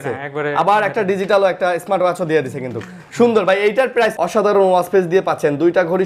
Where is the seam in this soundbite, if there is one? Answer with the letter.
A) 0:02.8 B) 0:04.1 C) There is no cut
B